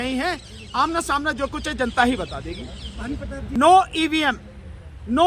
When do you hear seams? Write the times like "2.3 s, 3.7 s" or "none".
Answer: 3.5 s